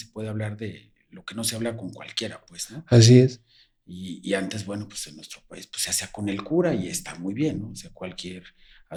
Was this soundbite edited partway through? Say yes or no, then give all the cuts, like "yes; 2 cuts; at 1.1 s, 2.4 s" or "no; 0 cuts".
no; 0 cuts